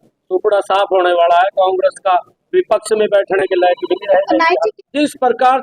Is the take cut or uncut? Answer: cut